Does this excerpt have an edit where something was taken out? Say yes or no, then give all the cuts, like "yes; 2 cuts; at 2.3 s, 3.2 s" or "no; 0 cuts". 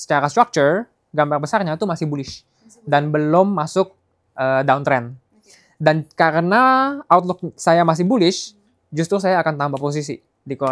no; 0 cuts